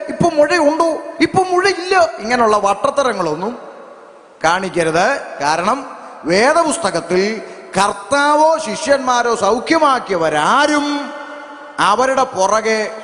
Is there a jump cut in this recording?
no; 0 cuts

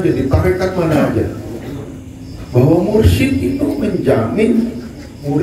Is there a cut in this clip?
no; 0 cuts

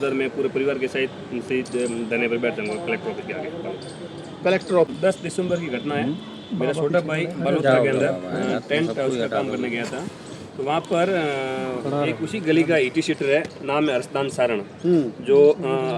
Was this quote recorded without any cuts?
no; 1 cut; at 5.0 s

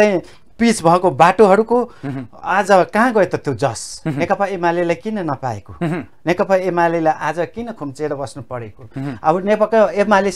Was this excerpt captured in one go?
yes; 0 cuts

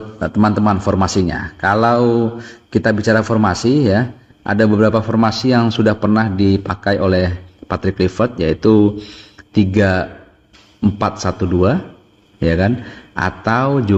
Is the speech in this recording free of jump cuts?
yes; 0 cuts

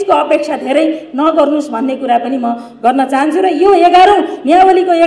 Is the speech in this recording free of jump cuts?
yes; 0 cuts

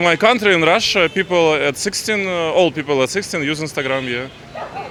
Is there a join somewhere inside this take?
no; 0 cuts

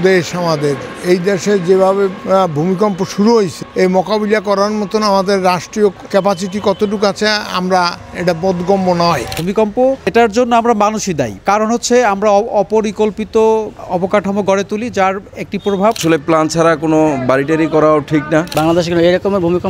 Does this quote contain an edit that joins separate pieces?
yes; 3 cuts; at 9.4 s, 16.0 s, 18.5 s

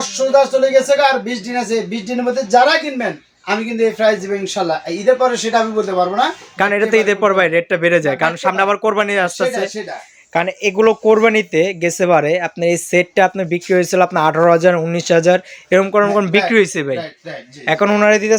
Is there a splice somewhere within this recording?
no; 0 cuts

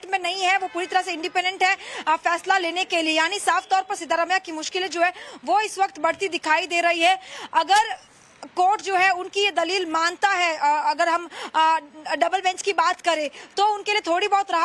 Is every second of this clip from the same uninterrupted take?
yes; 0 cuts

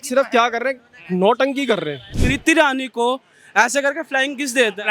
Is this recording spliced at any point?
yes; 1 cut; at 2.1 s

